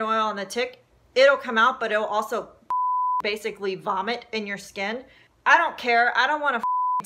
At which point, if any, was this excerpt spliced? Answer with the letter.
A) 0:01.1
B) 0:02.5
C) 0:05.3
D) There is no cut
C